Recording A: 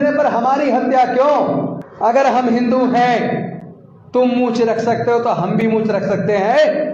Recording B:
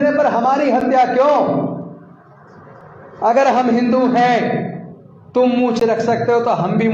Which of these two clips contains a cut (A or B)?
A